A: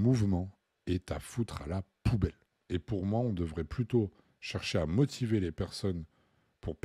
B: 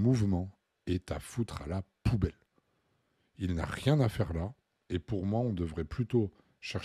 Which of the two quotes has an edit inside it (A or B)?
A